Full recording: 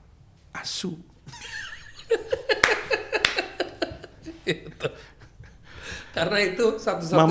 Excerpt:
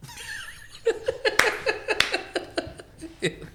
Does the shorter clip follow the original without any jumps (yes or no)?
yes